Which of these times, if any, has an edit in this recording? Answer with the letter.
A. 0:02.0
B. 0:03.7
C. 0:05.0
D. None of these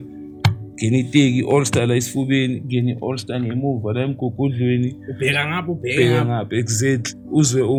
D